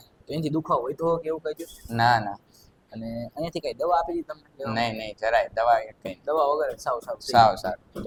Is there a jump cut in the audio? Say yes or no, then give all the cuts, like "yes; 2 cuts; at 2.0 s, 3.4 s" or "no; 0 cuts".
no; 0 cuts